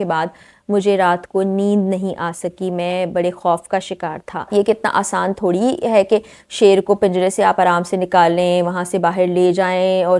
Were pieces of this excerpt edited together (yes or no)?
yes